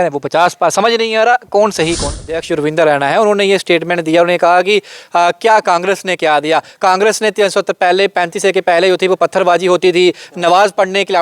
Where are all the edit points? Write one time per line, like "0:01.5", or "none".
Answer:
0:02.4